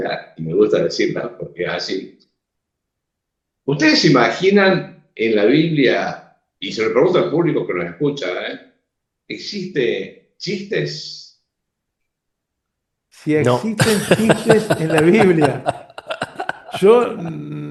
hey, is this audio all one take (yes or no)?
yes